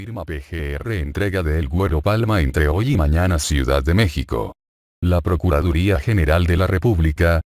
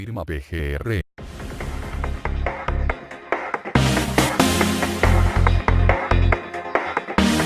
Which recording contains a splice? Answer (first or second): first